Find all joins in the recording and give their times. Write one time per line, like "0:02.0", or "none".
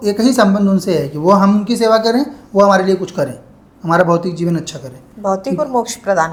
none